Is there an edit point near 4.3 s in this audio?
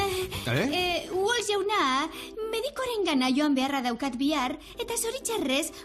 yes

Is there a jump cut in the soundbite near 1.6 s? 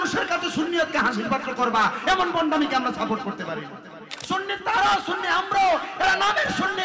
no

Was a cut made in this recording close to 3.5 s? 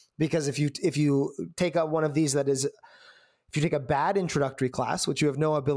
no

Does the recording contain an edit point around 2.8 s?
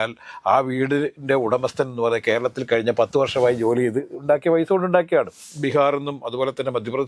no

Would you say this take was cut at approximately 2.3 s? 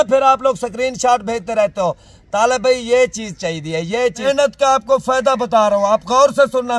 no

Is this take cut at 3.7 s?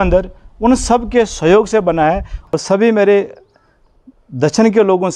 no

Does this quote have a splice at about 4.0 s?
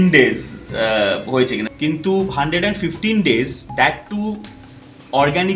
no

